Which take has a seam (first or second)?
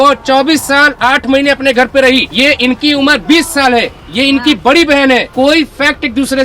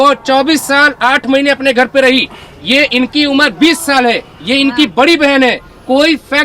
first